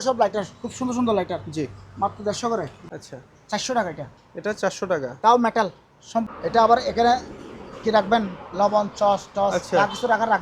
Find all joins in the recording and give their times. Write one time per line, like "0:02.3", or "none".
0:02.8
0:06.2